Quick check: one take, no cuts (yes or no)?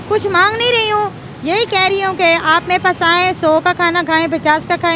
yes